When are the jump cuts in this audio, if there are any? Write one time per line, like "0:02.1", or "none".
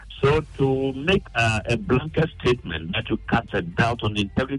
0:01.3